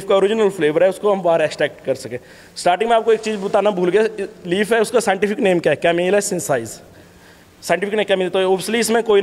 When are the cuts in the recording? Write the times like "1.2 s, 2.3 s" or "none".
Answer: none